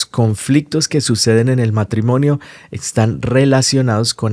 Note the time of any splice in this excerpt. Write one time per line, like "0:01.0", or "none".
none